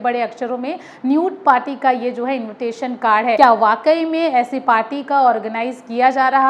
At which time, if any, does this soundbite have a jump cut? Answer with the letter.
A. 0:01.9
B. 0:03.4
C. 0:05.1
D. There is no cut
B